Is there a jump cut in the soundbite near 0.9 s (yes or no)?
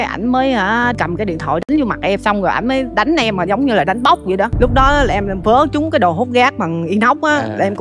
yes